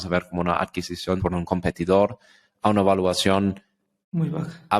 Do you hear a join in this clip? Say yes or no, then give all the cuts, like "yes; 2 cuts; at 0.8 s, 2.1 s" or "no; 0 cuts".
yes; 1 cut; at 1.3 s